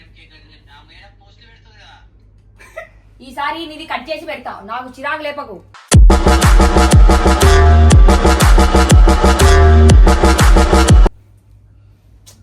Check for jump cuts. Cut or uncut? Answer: uncut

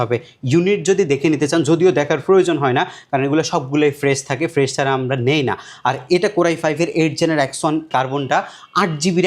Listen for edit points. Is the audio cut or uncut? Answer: cut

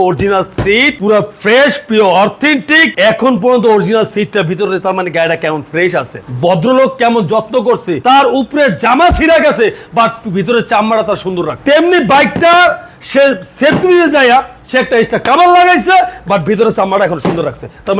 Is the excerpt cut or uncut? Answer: uncut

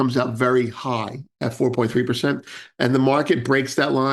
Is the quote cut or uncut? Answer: uncut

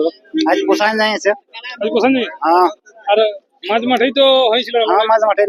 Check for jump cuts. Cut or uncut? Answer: uncut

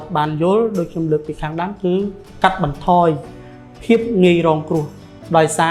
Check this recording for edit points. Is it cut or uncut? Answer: uncut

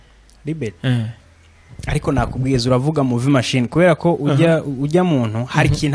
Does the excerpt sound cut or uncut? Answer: uncut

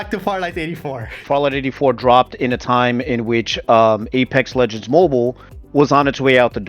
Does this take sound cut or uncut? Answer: cut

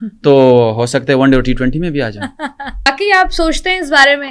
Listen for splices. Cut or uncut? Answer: cut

